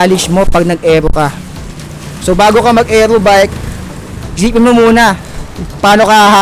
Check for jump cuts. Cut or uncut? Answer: uncut